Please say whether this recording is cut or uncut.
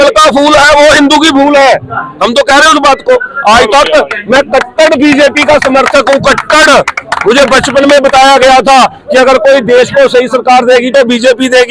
uncut